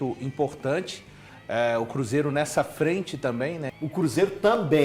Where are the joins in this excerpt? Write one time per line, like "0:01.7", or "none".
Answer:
0:03.7